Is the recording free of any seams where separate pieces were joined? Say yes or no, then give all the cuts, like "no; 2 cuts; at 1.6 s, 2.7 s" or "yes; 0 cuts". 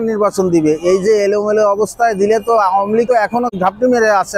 no; 1 cut; at 3.2 s